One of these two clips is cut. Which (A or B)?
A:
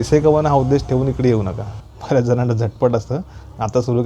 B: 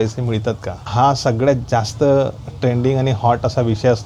A